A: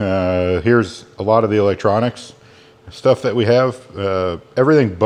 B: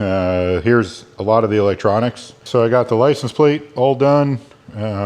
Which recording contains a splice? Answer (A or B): B